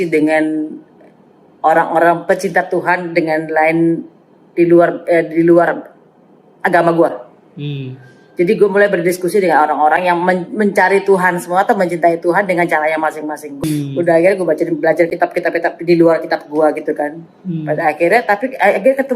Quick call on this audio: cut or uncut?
cut